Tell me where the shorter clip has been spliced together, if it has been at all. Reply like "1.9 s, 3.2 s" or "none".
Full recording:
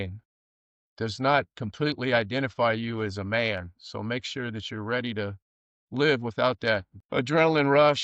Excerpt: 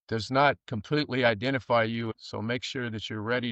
2.1 s